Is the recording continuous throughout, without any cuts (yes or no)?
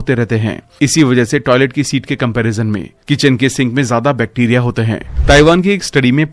no